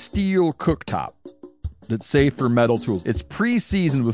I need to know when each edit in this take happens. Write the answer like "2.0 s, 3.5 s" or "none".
3.0 s